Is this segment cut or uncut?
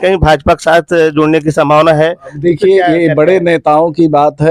uncut